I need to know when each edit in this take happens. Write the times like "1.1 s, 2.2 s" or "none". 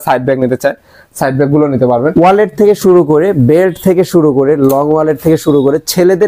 2.1 s